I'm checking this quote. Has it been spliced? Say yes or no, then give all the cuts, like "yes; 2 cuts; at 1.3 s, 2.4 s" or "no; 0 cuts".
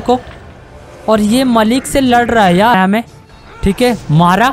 yes; 1 cut; at 2.7 s